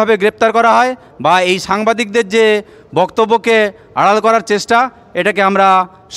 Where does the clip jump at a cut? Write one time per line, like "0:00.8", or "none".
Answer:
none